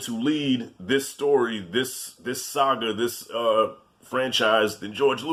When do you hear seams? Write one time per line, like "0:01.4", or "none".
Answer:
none